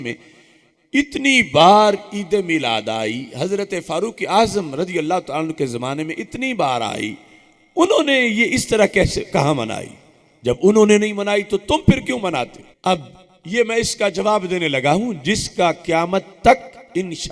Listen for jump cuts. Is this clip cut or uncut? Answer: cut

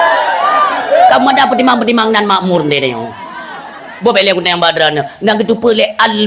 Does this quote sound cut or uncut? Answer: cut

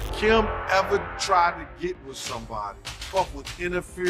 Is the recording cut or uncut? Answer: cut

